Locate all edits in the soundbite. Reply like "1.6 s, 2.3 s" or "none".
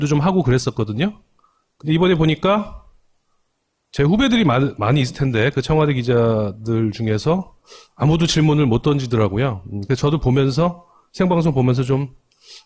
2.1 s